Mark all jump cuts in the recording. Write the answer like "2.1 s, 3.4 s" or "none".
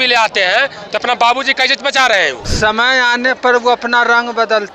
2.4 s